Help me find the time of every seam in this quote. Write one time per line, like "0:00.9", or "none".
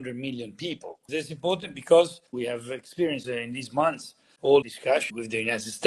0:00.9
0:02.3
0:03.2
0:04.7